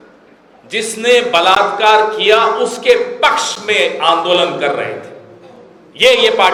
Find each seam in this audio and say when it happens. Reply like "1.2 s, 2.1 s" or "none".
none